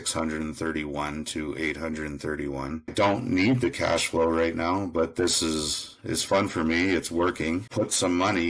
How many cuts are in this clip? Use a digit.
2